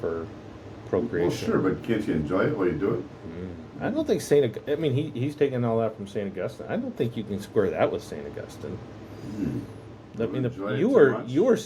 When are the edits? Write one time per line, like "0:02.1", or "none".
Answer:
none